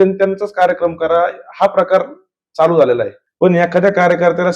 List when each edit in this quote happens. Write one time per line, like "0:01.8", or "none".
0:03.2